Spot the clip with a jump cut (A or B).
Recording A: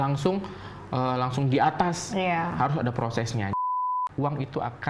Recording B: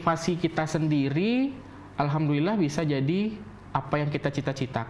A